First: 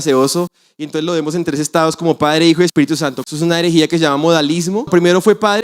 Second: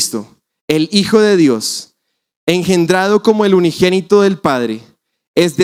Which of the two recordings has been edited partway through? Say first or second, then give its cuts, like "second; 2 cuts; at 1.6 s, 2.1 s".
first; 2 cuts; at 3.2 s, 4.9 s